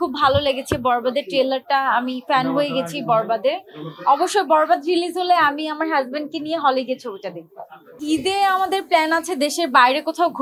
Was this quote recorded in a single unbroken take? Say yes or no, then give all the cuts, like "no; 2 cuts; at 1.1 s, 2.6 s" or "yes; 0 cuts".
yes; 0 cuts